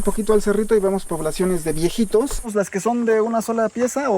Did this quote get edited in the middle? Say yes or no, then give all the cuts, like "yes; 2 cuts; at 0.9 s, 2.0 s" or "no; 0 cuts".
yes; 1 cut; at 2.5 s